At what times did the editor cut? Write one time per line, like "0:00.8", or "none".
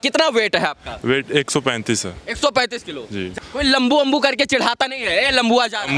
0:03.3

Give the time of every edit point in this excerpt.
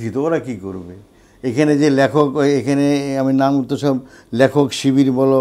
none

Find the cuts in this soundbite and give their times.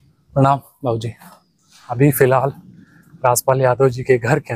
0:02.0

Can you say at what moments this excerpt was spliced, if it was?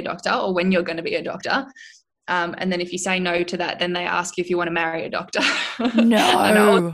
none

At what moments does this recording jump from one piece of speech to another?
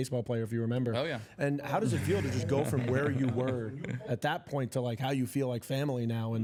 none

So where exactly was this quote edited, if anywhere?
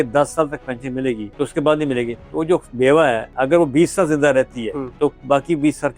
0:01.3
0:03.3
0:04.8

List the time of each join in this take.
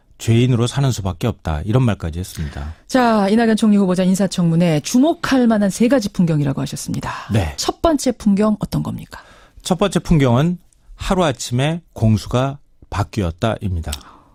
none

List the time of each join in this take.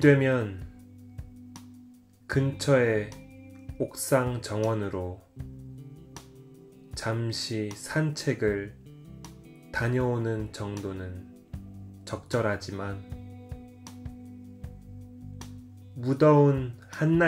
none

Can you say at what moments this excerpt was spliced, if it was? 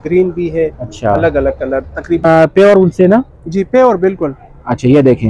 0:02.2

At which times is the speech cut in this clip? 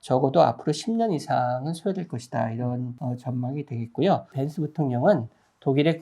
0:02.9
0:04.4

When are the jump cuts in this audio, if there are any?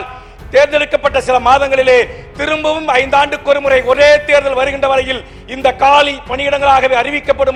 none

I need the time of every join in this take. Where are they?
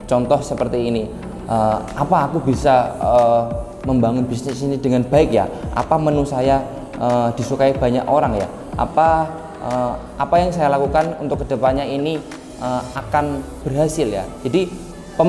none

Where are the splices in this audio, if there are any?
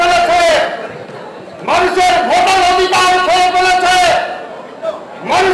none

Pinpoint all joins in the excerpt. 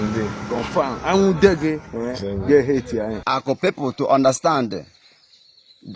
0:03.2

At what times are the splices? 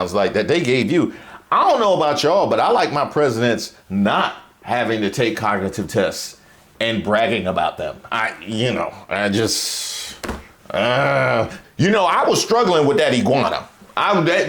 0:11.6

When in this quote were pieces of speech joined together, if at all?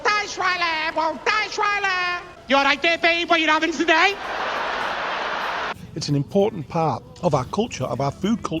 0:02.3
0:05.8
0:07.1

